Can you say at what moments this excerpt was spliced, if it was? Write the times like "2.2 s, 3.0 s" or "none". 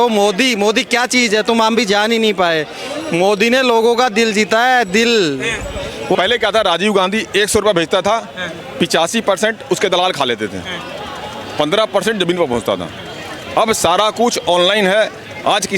6.1 s